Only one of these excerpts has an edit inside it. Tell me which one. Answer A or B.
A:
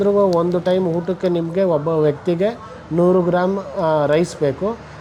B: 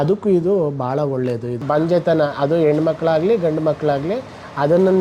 B